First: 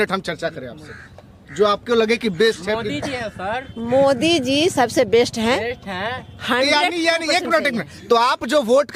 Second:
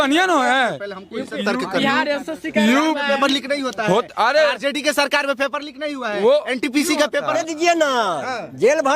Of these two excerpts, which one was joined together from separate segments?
second; 1 cut; at 7.4 s

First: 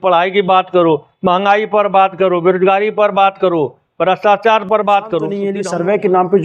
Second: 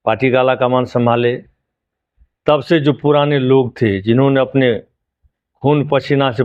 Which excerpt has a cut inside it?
first; 1 cut; at 5.4 s

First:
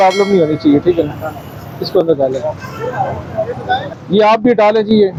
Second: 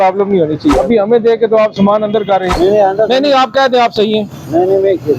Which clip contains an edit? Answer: second; 2 cuts; at 0.7 s, 2.5 s

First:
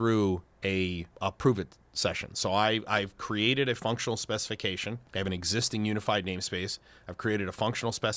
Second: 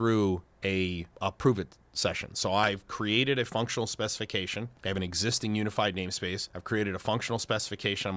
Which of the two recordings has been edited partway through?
second; 2 cuts; at 2.6 s, 6.5 s

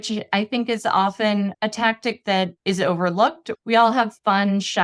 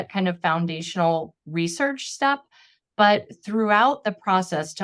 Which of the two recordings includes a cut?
first; 3 cuts; at 1.5 s, 2.6 s, 3.5 s

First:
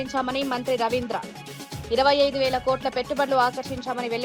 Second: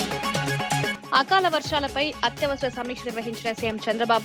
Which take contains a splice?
second; 1 cut; at 0.9 s

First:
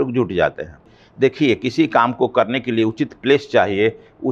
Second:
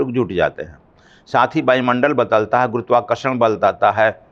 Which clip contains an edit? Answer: first; 1 cut; at 1.0 s

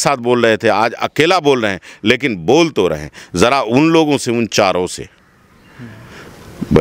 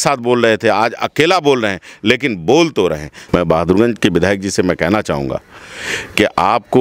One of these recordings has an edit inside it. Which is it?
second; 1 cut; at 3.1 s

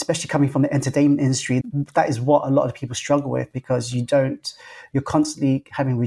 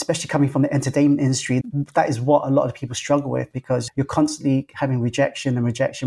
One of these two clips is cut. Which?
second; 1 cut; at 3.9 s

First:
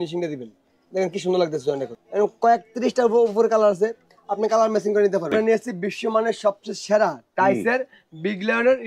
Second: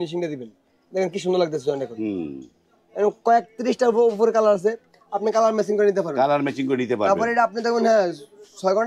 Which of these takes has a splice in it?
first; 2 cuts; at 1.9 s, 5.3 s

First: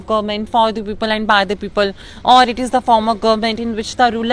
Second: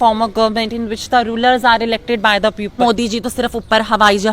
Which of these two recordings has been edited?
second; 1 cut; at 2.8 s

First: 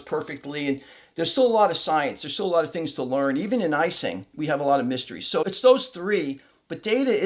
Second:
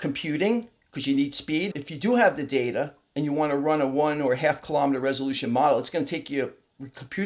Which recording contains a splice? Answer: second; 1 cut; at 1.7 s

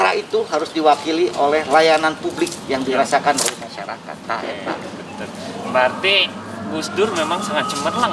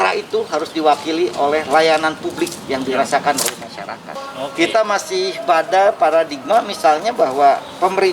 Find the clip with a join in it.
second; 1 cut; at 4.1 s

